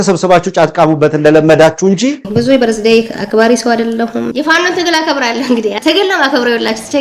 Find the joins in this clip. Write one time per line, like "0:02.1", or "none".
0:02.2
0:03.2
0:04.3
0:05.8